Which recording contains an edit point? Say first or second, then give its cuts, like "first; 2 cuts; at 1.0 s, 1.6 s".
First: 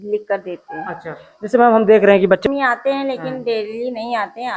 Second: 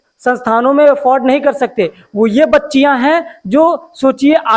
first; 1 cut; at 2.5 s